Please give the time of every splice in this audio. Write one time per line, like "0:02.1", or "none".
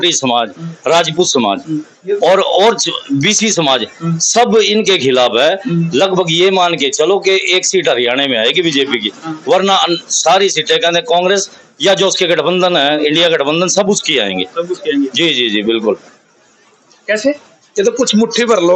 none